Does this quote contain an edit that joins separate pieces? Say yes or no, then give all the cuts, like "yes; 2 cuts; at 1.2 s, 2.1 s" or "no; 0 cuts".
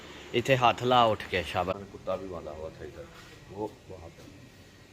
yes; 1 cut; at 1.8 s